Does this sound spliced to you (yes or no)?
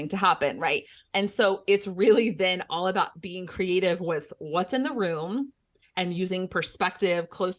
no